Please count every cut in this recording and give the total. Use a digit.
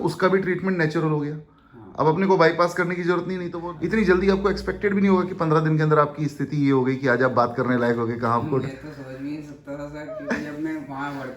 1